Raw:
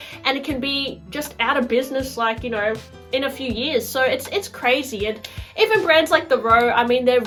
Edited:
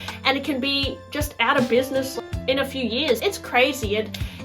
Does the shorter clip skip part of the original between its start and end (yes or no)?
yes